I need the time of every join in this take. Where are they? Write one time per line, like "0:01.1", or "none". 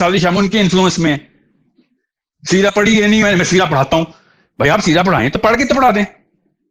none